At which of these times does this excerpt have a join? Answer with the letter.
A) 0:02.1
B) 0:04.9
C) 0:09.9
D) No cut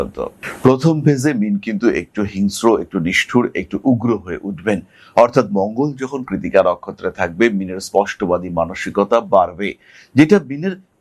D